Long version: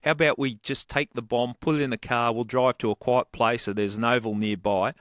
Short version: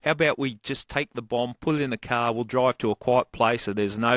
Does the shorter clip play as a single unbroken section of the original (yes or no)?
yes